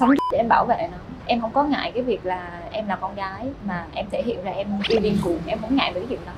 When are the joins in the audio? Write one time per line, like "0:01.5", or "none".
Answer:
0:01.1
0:03.6
0:04.8